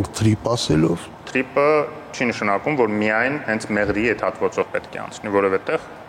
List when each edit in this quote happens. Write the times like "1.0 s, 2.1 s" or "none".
1.2 s

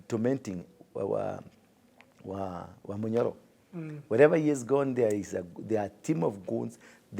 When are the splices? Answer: none

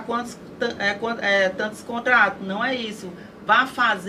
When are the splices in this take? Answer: none

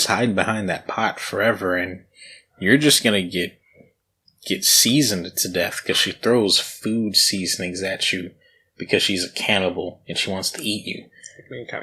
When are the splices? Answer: none

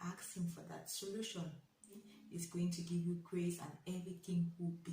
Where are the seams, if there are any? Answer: 2.0 s

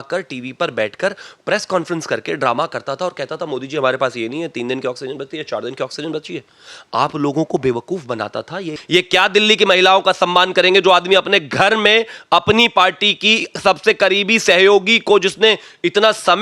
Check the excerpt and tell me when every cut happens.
8.7 s

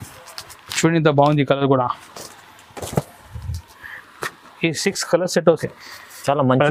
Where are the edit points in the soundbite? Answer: 5.4 s

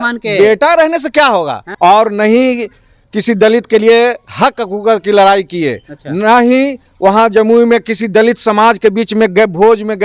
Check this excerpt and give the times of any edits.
1.6 s

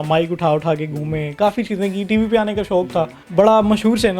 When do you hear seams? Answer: 3.2 s

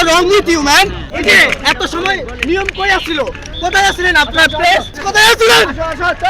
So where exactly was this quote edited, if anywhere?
1.0 s, 5.0 s

